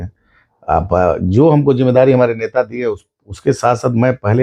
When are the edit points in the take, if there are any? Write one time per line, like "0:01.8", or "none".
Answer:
none